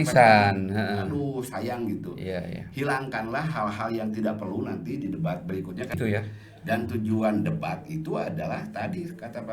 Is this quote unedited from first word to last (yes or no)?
no